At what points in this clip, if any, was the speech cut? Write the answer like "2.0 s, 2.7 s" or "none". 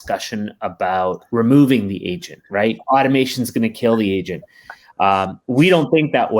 1.2 s, 2.8 s